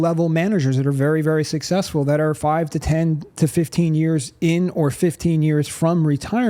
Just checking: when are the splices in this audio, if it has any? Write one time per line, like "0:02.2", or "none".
none